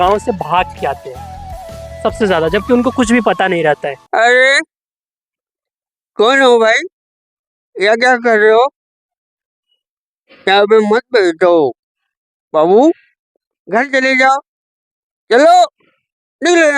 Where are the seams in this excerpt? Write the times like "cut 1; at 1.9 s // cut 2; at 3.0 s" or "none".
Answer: cut 1; at 3.9 s